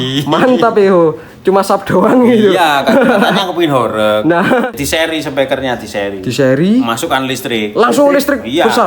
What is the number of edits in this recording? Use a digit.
1